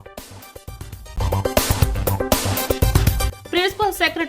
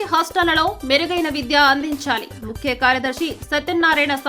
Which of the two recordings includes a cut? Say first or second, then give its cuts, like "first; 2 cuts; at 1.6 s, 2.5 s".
first; 2 cuts; at 1.1 s, 3.4 s